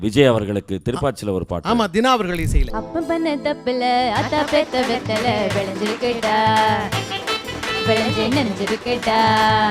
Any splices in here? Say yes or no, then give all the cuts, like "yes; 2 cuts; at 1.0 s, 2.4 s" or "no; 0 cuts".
yes; 1 cut; at 2.6 s